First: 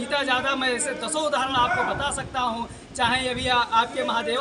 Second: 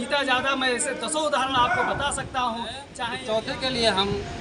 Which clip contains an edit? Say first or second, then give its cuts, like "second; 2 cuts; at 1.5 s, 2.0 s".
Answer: second; 1 cut; at 3.0 s